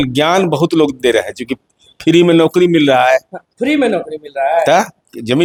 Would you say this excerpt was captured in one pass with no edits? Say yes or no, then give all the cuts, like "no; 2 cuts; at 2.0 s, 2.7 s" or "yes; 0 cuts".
yes; 0 cuts